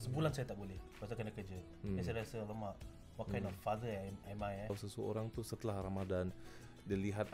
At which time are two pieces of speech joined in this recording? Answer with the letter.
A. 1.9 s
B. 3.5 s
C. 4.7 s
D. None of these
C